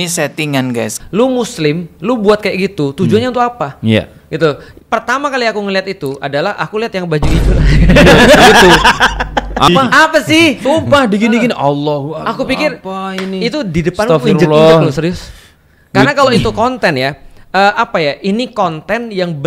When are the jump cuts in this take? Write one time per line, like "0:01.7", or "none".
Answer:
0:01.0
0:09.7